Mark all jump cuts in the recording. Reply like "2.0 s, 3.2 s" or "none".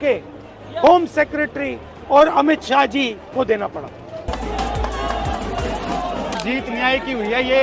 4.3 s